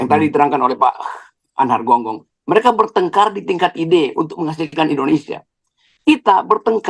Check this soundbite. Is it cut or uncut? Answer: uncut